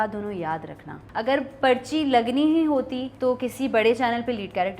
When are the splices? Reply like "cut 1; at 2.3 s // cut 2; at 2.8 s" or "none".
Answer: cut 1; at 1.0 s // cut 2; at 3.0 s